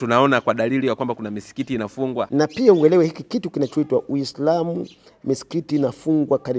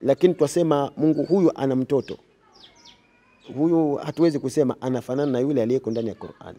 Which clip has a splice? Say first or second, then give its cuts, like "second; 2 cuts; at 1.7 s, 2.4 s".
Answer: first; 1 cut; at 2.3 s